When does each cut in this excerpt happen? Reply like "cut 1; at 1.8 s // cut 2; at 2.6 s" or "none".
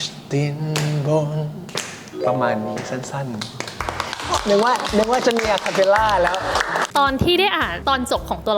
cut 1; at 6.8 s // cut 2; at 7.7 s